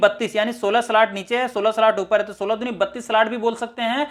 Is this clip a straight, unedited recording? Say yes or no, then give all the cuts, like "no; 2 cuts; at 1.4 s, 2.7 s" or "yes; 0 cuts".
yes; 0 cuts